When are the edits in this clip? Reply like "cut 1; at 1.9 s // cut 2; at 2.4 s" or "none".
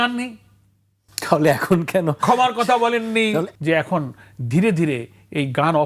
cut 1; at 3.5 s